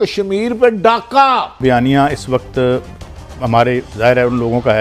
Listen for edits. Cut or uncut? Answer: cut